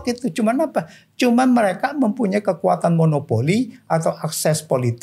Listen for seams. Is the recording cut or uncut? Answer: uncut